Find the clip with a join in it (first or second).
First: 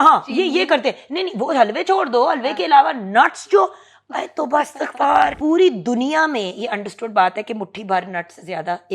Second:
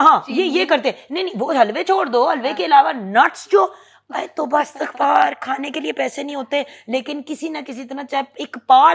first